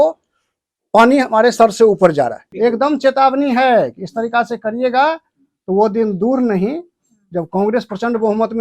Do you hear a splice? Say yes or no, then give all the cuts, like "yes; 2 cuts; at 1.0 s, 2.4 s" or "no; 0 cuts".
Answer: yes; 1 cut; at 2.4 s